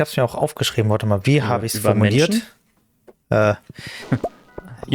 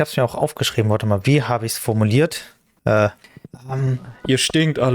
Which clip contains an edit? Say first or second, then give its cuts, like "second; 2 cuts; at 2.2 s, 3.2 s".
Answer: second; 2 cuts; at 2.3 s, 3.6 s